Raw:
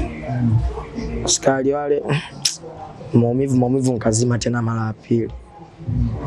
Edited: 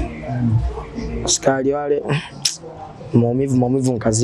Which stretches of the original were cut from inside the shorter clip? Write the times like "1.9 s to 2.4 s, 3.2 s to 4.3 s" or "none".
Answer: none